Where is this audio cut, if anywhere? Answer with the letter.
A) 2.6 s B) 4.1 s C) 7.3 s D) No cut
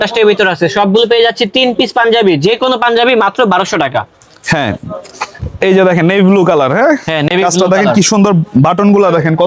D